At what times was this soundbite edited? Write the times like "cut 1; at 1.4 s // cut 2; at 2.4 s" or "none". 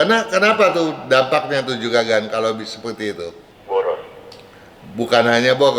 cut 1; at 3.5 s